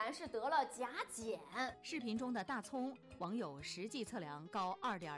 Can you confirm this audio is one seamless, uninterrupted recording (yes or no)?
no